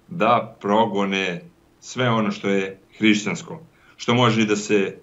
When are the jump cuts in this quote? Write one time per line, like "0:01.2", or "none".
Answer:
none